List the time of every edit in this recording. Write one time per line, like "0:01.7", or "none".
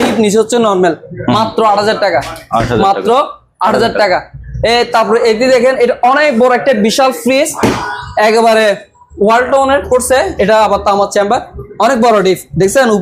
none